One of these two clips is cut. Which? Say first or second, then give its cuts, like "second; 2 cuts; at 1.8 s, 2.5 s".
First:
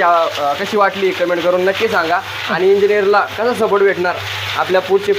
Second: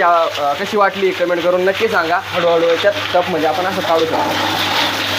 second; 1 cut; at 2.3 s